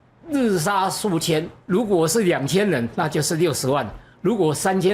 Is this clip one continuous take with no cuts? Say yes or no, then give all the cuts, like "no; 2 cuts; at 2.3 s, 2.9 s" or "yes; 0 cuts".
no; 1 cut; at 1.6 s